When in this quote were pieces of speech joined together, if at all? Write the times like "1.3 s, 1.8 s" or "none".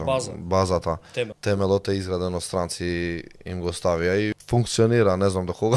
1.4 s, 4.4 s